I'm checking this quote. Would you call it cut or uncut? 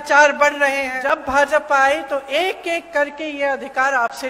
cut